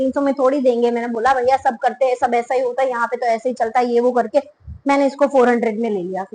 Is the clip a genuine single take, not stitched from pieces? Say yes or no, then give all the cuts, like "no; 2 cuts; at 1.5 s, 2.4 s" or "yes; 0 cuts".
yes; 0 cuts